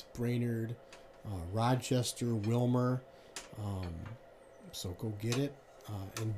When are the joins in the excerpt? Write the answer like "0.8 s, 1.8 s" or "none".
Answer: none